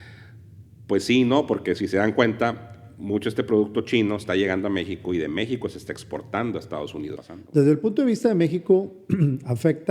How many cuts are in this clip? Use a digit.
1